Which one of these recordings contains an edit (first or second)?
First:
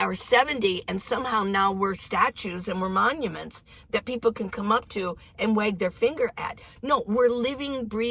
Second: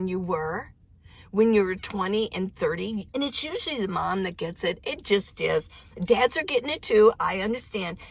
second